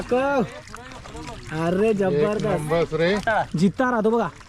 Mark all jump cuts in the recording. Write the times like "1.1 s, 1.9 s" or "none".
3.2 s